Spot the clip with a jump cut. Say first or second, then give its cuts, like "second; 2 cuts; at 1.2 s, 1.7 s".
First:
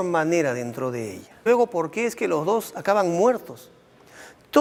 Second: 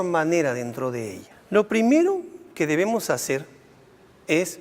second; 1 cut; at 1.4 s